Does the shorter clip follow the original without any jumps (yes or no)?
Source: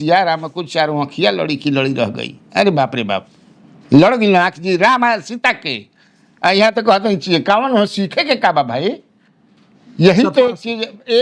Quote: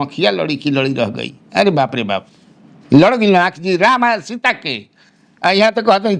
yes